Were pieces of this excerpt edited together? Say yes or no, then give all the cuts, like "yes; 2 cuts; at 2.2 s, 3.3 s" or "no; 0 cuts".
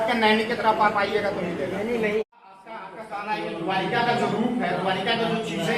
yes; 1 cut; at 2.6 s